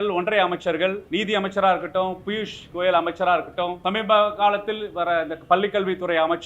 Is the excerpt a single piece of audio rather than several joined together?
no; 2 cuts; at 1.0 s, 3.8 s

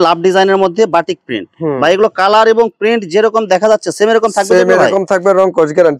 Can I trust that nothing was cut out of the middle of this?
yes; 0 cuts

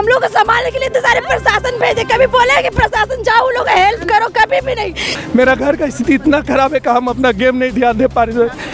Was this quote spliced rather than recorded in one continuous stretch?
yes; 1 cut; at 5.1 s

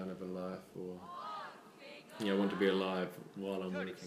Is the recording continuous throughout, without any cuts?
yes; 0 cuts

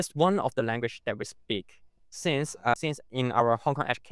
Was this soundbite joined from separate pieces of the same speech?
yes; 1 cut; at 2.7 s

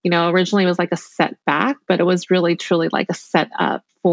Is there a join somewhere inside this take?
no; 0 cuts

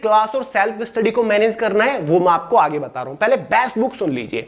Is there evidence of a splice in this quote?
no; 0 cuts

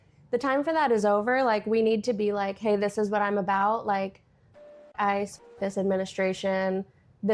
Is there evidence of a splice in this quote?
no; 0 cuts

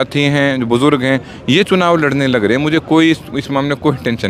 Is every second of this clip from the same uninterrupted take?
yes; 0 cuts

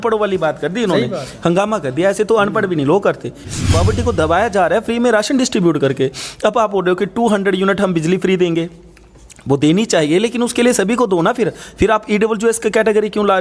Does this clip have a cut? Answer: yes; 1 cut; at 3.4 s

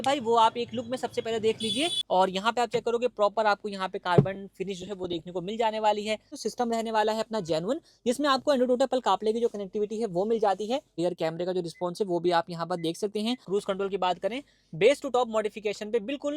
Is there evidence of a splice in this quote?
yes; 4 cuts; at 2.0 s, 6.3 s, 10.9 s, 13.4 s

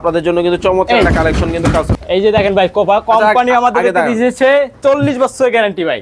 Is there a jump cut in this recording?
yes; 1 cut; at 1.9 s

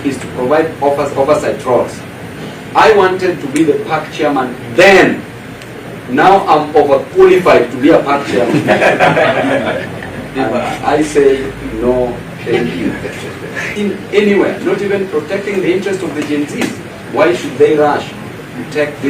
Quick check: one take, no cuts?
no; 1 cut; at 13.7 s

